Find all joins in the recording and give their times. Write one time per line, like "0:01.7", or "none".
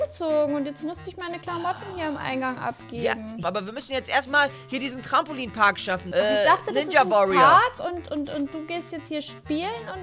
0:03.4
0:06.0